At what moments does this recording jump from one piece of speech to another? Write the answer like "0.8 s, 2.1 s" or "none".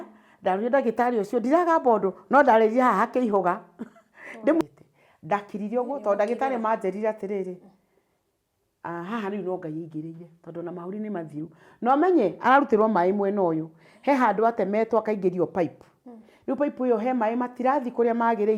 4.6 s